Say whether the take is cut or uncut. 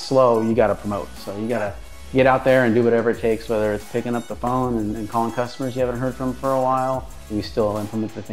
cut